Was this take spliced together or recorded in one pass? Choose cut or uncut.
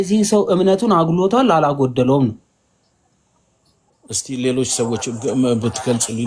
uncut